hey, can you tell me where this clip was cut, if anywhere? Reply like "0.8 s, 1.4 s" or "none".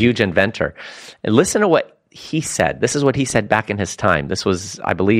none